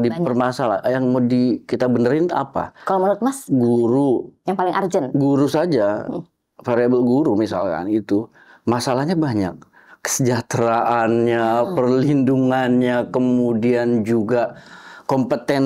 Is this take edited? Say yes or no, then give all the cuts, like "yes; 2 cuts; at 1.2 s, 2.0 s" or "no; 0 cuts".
no; 0 cuts